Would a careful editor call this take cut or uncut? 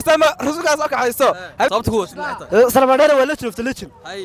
cut